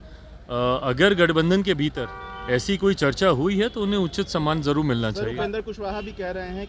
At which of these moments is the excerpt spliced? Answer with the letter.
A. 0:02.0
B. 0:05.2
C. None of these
C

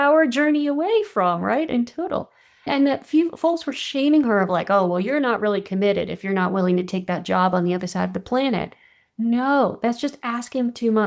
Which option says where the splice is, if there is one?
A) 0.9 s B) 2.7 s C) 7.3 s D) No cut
B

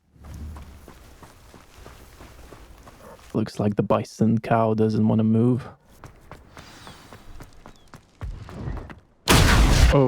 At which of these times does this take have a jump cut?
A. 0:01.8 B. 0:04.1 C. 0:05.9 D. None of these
C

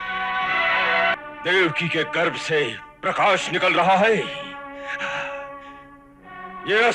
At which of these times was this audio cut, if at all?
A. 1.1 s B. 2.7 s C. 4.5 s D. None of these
A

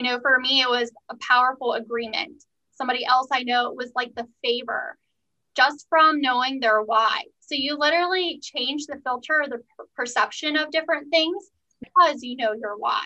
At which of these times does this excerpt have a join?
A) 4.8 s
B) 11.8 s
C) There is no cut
B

